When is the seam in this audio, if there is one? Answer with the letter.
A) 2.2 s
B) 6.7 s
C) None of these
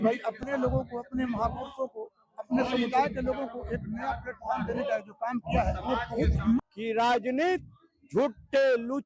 B